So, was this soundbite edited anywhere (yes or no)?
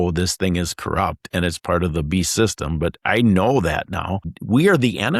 yes